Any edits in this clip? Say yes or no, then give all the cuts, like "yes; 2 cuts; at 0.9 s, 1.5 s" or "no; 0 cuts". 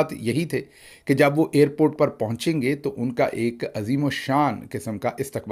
no; 0 cuts